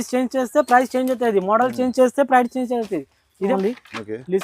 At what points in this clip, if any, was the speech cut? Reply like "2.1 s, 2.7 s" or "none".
3.5 s